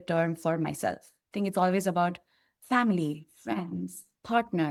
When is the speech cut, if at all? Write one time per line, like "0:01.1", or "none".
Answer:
none